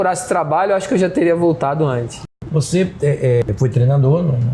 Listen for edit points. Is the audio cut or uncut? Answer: cut